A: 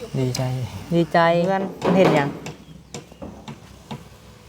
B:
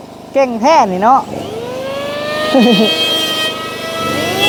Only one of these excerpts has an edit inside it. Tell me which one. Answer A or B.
A